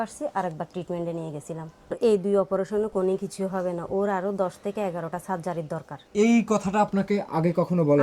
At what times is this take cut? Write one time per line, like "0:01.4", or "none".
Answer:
0:02.0
0:06.0